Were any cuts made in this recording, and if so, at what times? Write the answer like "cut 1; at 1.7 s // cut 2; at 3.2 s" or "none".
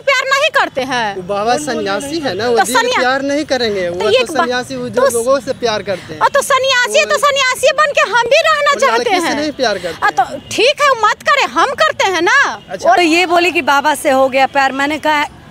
cut 1; at 13.0 s